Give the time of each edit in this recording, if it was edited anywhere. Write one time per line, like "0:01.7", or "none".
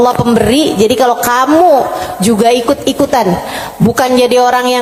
none